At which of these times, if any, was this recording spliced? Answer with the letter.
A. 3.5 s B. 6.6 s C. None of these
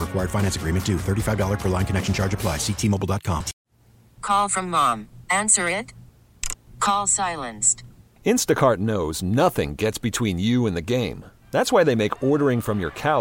A